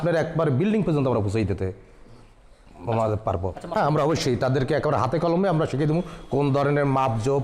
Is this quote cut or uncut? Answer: cut